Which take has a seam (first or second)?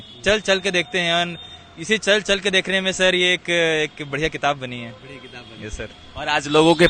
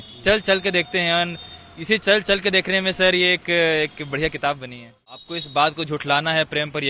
second